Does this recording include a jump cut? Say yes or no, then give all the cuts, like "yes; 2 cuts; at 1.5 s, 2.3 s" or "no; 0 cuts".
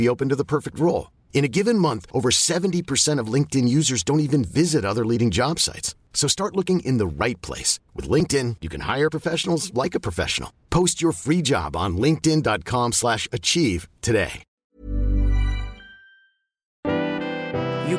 yes; 2 cuts; at 14.4 s, 16.8 s